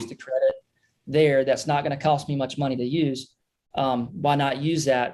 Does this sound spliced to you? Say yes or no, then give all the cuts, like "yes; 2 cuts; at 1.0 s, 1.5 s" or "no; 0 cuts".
no; 0 cuts